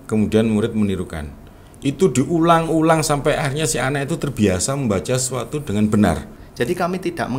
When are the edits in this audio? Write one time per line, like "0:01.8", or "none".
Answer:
0:06.4